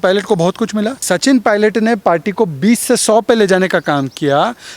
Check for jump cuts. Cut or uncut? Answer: cut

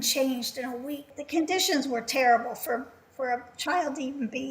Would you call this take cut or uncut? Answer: cut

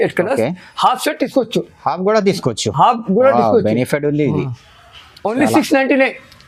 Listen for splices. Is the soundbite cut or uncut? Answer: uncut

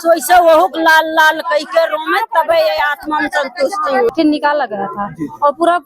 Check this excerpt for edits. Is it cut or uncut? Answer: cut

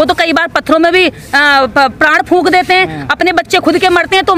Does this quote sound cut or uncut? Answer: uncut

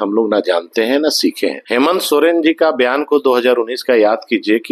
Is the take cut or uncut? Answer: cut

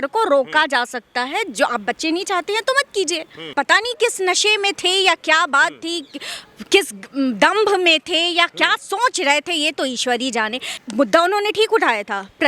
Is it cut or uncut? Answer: cut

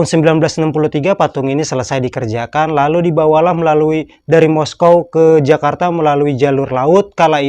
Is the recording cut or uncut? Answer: uncut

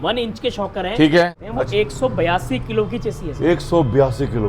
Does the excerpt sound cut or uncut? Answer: cut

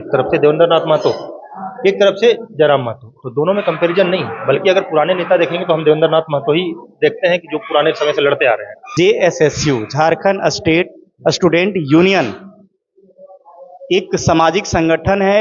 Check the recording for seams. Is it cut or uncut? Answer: cut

